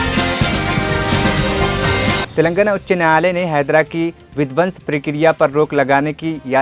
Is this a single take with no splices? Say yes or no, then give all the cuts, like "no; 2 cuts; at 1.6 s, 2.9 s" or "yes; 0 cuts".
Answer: no; 1 cut; at 2.3 s